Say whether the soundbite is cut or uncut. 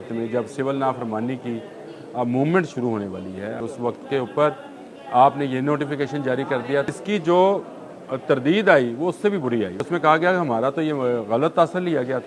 cut